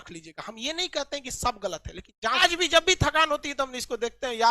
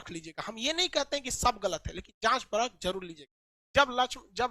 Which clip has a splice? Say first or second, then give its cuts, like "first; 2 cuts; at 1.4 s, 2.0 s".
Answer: first; 1 cut; at 2.4 s